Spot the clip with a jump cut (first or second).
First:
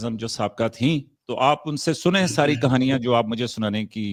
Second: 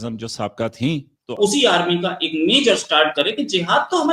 second